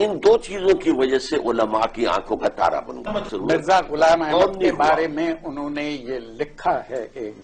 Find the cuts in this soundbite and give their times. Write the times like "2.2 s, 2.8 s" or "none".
3.3 s